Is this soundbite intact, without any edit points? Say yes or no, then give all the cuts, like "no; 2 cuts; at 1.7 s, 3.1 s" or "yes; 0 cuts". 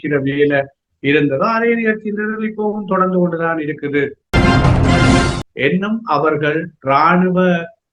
no; 2 cuts; at 4.2 s, 5.4 s